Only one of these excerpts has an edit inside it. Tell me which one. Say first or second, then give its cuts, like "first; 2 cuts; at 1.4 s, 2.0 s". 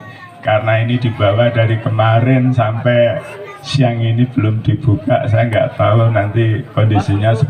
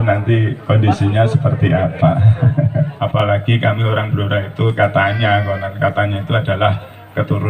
second; 1 cut; at 3.0 s